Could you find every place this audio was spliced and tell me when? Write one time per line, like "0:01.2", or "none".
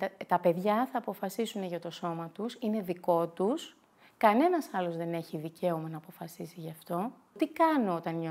0:07.4